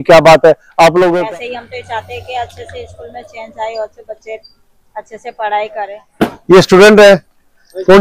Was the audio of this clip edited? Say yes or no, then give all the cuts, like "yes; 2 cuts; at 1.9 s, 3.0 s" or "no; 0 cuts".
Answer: yes; 2 cuts; at 1.1 s, 6.0 s